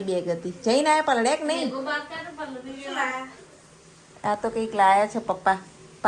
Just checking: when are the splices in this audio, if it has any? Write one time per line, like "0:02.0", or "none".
none